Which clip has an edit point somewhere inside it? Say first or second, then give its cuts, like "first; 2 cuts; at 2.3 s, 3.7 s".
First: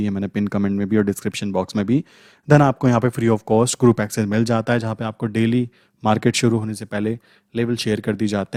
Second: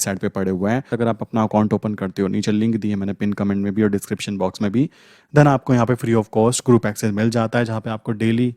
second; 1 cut; at 0.9 s